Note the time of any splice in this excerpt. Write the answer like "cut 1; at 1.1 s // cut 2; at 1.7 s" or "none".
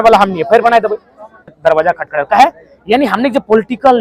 cut 1; at 1.6 s